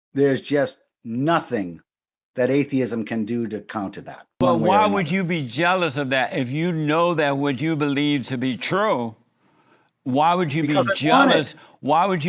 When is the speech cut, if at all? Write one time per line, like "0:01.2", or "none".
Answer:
0:04.4